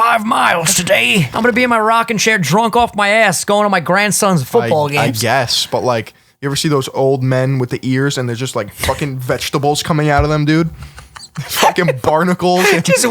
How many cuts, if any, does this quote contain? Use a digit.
2